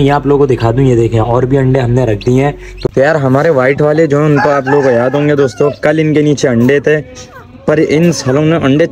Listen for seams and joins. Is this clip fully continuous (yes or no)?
no